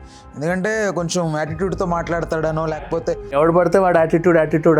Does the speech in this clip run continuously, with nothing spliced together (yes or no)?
no